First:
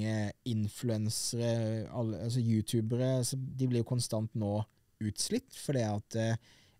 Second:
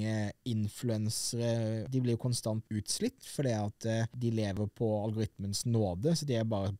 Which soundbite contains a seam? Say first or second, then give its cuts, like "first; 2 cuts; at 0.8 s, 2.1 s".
second; 3 cuts; at 1.8 s, 2.6 s, 4.5 s